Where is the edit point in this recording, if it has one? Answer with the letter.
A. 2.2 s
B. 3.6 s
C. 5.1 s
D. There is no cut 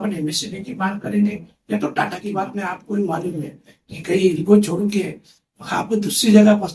A